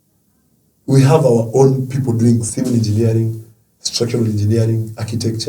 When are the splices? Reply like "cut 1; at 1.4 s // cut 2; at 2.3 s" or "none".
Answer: cut 1; at 2.5 s